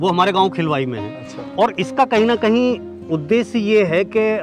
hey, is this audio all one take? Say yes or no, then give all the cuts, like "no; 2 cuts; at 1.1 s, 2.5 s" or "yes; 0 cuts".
yes; 0 cuts